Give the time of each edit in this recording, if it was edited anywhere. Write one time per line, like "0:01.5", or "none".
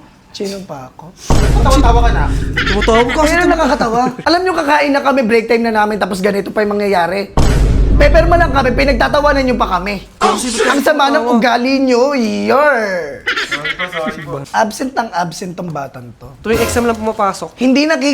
0:04.2
0:14.4